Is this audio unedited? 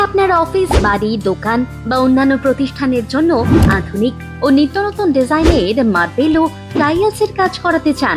yes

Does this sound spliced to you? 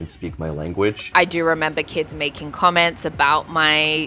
yes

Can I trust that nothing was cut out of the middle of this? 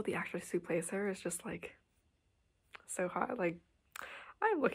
yes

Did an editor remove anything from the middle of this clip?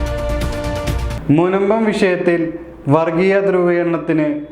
yes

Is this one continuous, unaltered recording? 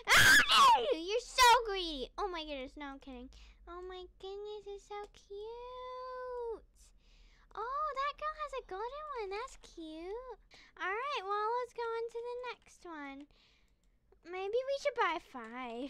yes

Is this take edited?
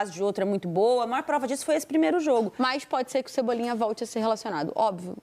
yes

